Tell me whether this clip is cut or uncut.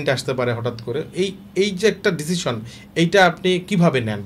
uncut